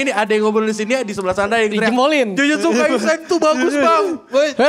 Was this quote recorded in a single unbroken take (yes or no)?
yes